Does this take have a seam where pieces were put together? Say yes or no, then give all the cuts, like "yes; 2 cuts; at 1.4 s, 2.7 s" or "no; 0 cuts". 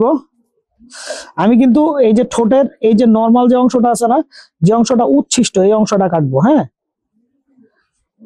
no; 0 cuts